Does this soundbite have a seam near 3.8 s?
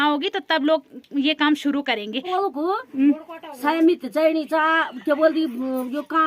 no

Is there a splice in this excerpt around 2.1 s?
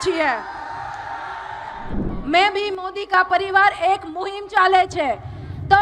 yes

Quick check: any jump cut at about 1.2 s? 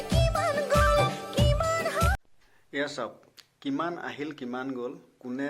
yes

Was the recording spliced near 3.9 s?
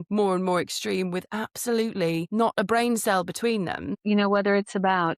yes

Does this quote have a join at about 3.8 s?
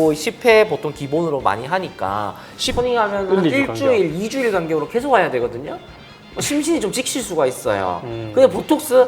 no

